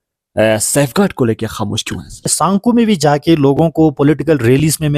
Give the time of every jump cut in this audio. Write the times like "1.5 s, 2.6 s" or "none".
2.3 s